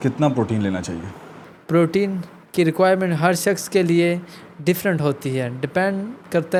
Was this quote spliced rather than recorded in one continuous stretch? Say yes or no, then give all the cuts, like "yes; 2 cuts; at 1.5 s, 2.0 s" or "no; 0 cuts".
no; 0 cuts